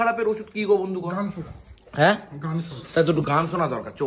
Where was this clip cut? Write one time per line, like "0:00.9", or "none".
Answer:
none